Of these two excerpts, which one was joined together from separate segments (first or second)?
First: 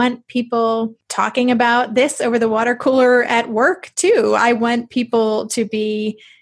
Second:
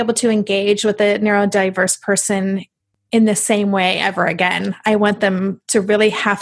first